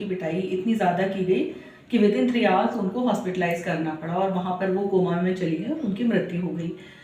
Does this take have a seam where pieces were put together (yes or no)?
no